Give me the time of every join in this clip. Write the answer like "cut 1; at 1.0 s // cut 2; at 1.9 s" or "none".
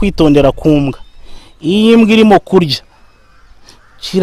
none